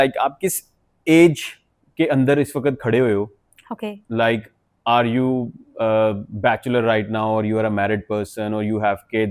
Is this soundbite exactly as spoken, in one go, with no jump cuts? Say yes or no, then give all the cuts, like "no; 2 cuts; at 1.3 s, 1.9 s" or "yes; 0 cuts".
yes; 0 cuts